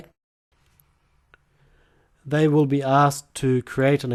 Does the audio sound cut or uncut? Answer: uncut